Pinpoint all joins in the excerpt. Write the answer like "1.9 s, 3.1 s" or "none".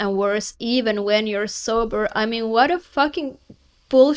none